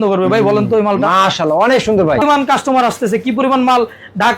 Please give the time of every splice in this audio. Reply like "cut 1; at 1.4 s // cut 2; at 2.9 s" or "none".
cut 1; at 2.2 s